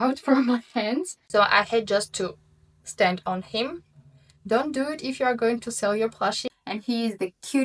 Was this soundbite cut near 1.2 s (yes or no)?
yes